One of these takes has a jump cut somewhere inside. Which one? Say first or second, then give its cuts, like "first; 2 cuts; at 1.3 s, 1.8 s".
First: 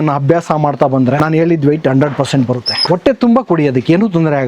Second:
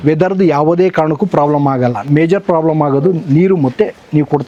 first; 2 cuts; at 1.2 s, 2.7 s